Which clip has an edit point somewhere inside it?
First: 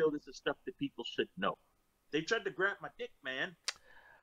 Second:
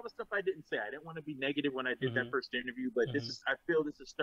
first; 1 cut; at 1.5 s

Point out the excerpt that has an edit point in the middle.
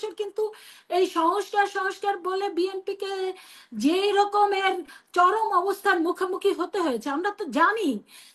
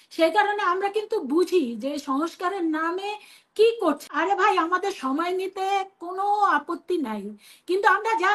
second; 1 cut; at 4.0 s

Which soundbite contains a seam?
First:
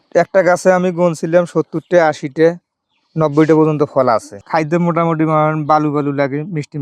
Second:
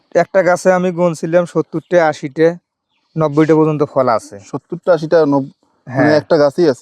first; 1 cut; at 4.4 s

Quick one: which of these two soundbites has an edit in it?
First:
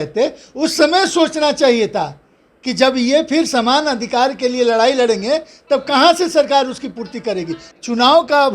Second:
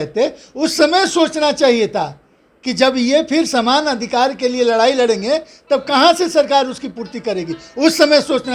first; 1 cut; at 7.6 s

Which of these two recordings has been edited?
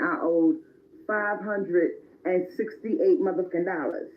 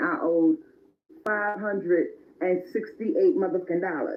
first; 1 cut; at 1.3 s

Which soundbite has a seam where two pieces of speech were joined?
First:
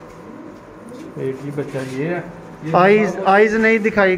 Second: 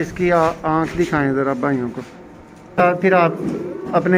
second; 1 cut; at 2.8 s

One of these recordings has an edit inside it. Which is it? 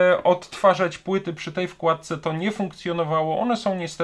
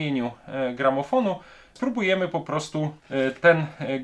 second; 2 cuts; at 1.8 s, 3.0 s

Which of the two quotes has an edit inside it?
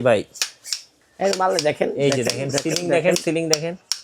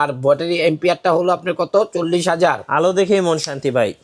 second; 1 cut; at 2.6 s

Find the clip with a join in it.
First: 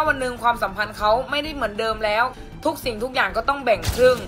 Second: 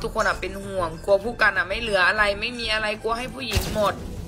first; 1 cut; at 2.3 s

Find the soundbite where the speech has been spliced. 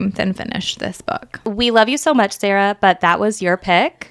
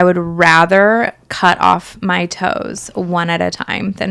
first; 1 cut; at 1.4 s

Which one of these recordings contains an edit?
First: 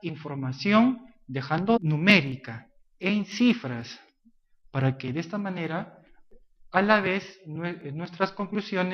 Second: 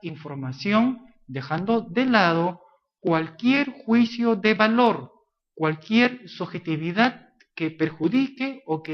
second; 1 cut; at 1.8 s

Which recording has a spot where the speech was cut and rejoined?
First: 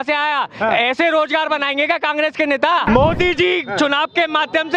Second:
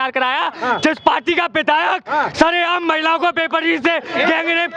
first; 1 cut; at 2.8 s

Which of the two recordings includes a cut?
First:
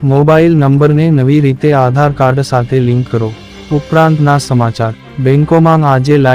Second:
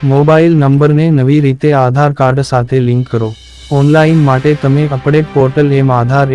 first; 1 cut; at 3.5 s

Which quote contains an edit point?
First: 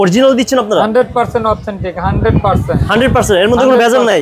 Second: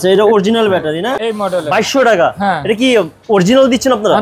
second; 1 cut; at 1.1 s

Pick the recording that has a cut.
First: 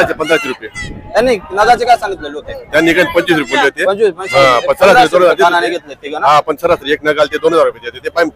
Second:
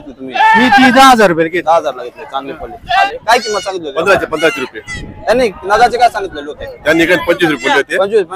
second; 1 cut; at 3.0 s

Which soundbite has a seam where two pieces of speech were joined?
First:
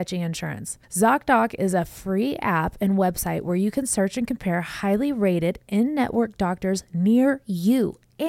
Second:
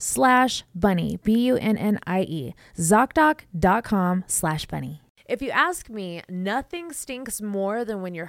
second; 1 cut; at 5.1 s

